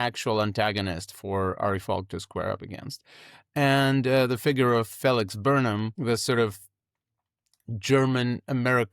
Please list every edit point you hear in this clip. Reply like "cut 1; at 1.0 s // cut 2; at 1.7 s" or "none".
cut 1; at 5.9 s